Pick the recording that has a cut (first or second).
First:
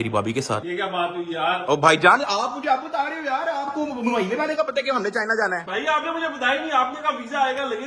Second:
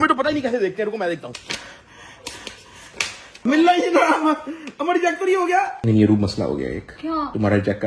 second